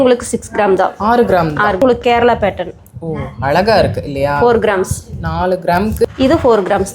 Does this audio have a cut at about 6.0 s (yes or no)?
yes